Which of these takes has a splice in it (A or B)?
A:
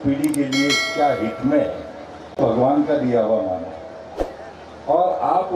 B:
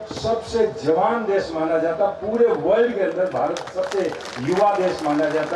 A